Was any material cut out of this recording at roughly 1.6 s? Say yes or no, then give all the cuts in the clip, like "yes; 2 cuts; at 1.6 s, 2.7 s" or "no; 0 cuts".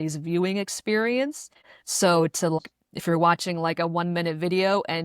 yes; 2 cuts; at 1.6 s, 2.6 s